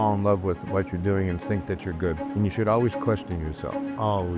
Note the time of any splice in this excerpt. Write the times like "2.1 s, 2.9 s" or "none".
2.2 s